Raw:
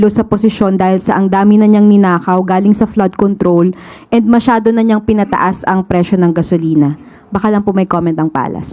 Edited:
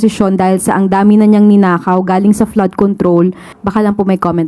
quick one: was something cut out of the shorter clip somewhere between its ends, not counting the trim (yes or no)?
yes